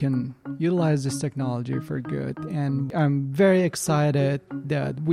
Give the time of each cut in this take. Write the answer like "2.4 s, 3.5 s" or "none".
2.9 s